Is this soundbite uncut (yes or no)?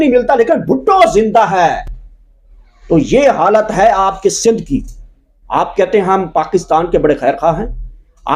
yes